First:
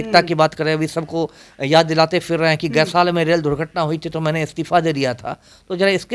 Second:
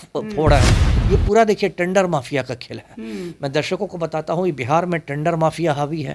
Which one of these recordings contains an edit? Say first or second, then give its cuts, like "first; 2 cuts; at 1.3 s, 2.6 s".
second; 1 cut; at 0.9 s